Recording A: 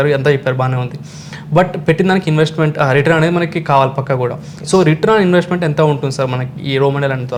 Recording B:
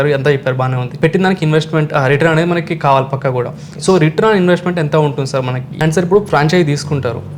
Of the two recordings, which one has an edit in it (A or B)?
B